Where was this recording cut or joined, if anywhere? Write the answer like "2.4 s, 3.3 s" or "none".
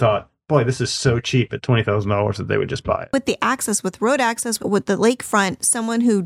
3.1 s, 4.6 s